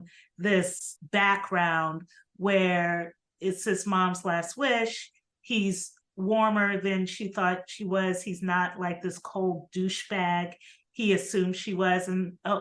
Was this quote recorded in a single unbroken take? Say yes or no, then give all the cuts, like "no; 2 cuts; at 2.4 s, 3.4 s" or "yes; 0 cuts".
yes; 0 cuts